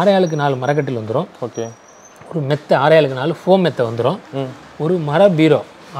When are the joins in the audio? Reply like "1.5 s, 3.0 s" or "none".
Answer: none